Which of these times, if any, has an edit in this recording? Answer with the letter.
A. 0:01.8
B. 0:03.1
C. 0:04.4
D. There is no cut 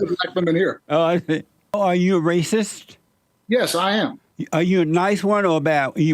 A